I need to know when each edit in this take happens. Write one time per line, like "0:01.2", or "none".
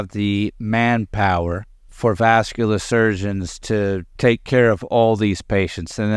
0:01.9
0:04.1